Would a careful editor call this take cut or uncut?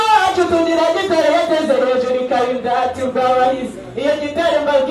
uncut